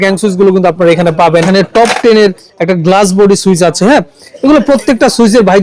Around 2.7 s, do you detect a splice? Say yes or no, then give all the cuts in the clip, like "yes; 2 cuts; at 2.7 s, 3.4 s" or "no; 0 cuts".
no; 1 cut; at 1.5 s